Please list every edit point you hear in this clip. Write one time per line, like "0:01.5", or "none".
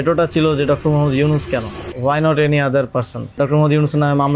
0:01.8
0:03.3